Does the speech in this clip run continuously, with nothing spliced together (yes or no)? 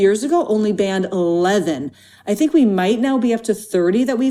yes